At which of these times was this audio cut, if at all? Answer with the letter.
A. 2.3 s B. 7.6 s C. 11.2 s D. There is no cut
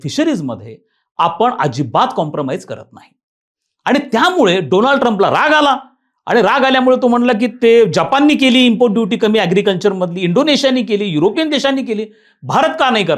D